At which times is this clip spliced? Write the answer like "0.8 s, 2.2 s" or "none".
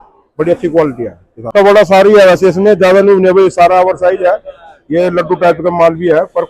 1.5 s